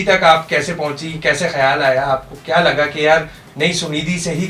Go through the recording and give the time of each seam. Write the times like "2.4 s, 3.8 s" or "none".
none